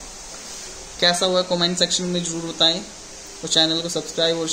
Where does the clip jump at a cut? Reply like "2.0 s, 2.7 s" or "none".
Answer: none